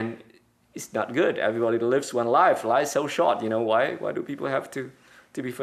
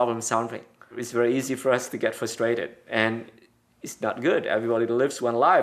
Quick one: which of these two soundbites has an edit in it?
second; 1 cut; at 1.0 s

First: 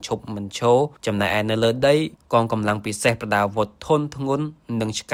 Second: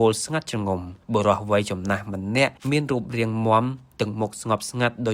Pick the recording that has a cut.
second; 2 cuts; at 0.9 s, 2.6 s

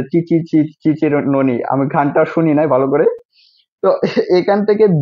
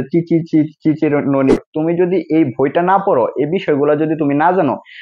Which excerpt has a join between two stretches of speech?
second; 1 cut; at 1.6 s

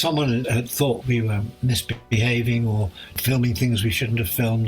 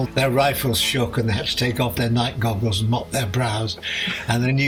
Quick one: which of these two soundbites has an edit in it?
first; 1 cut; at 3.2 s

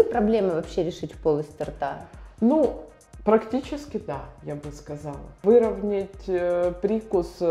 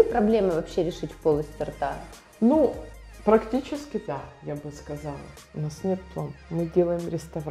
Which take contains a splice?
second; 1 cut; at 5.3 s

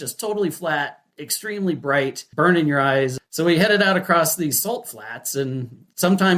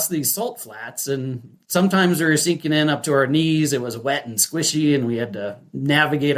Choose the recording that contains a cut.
first; 2 cuts; at 2.2 s, 3.2 s

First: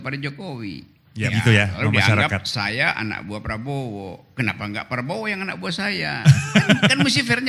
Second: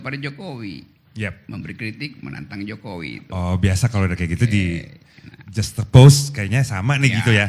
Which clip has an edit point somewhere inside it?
first; 1 cut; at 1.3 s

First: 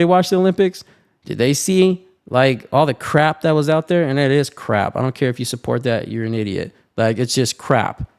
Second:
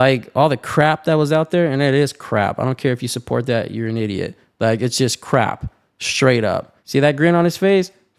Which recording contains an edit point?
second; 1 cut; at 6.8 s

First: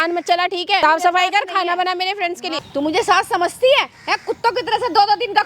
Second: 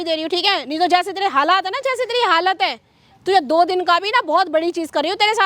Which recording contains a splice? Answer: first; 2 cuts; at 0.8 s, 2.6 s

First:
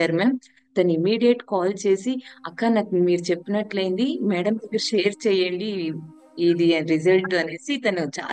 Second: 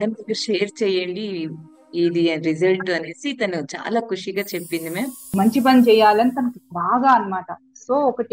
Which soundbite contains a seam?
second; 1 cut; at 5.2 s

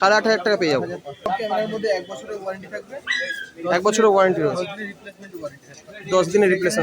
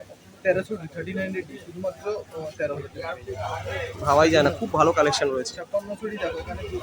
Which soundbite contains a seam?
first; 1 cut; at 1.3 s

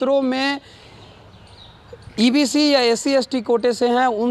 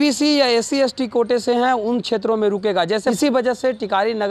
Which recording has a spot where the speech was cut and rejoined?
second; 1 cut; at 3.0 s

